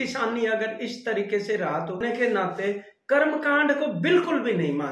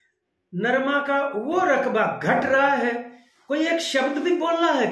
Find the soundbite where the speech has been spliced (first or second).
first